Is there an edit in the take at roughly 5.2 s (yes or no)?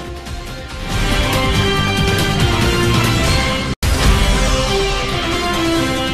no